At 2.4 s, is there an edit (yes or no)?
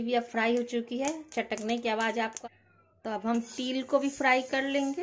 yes